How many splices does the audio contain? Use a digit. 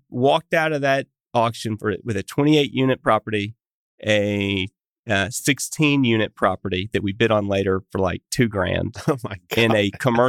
1